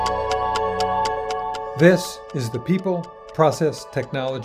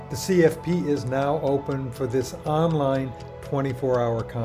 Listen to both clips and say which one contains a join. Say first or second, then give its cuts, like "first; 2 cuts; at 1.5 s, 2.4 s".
first; 1 cut; at 1.7 s